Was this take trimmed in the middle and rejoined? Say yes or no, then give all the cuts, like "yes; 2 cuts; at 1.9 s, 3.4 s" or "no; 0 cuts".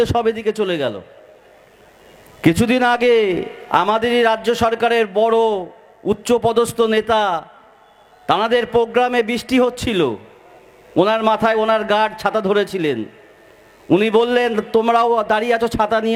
no; 0 cuts